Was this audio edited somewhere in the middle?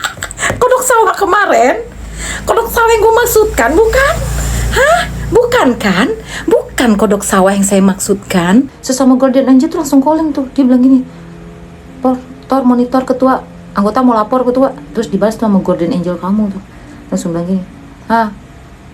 yes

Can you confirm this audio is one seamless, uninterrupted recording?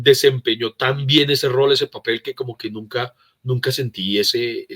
yes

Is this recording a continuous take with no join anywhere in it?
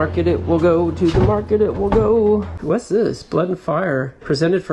no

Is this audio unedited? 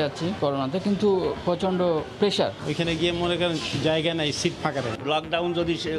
no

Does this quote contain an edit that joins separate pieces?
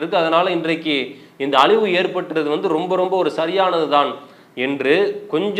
no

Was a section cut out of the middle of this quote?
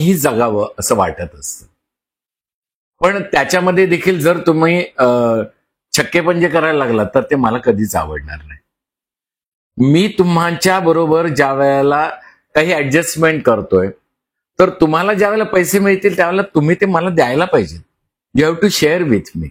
no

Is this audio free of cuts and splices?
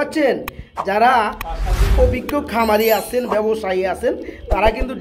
yes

